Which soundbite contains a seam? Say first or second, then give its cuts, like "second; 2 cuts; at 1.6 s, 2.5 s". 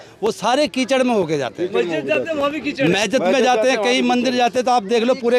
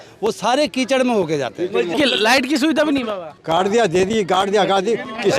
second; 2 cuts; at 1.9 s, 3.3 s